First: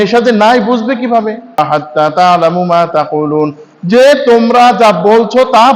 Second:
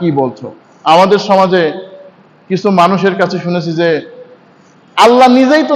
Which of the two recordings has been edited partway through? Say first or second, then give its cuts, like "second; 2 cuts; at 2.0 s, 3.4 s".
first; 1 cut; at 1.6 s